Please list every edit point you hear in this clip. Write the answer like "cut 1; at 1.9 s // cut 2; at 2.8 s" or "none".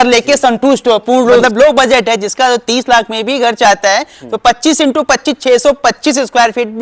cut 1; at 1.4 s